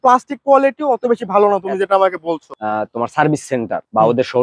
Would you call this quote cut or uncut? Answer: cut